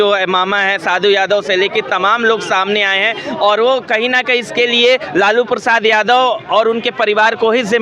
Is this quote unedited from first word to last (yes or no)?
yes